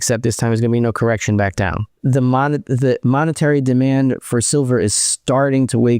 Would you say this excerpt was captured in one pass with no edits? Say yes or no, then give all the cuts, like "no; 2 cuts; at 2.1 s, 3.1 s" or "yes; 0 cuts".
no; 1 cut; at 2.0 s